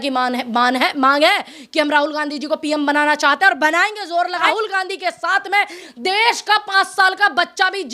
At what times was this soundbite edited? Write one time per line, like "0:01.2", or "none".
0:04.4